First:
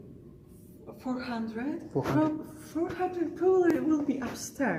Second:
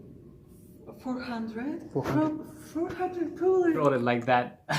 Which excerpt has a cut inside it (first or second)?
second